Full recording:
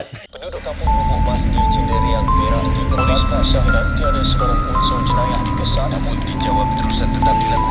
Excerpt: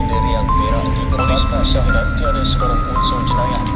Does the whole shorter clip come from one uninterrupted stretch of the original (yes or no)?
yes